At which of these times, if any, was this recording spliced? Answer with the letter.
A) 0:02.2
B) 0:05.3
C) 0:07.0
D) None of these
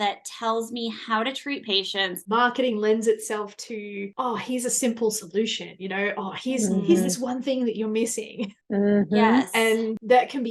A